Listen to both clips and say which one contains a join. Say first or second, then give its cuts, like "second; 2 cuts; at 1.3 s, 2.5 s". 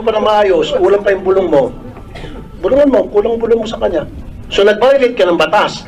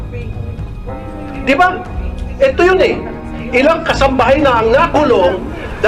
first; 1 cut; at 4.4 s